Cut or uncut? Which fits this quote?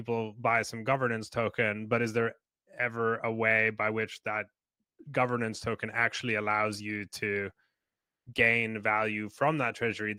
uncut